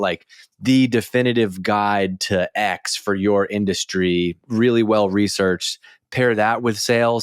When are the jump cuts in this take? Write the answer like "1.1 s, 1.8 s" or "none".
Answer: 4.4 s